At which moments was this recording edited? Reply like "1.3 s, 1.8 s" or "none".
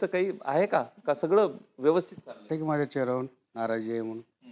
2.4 s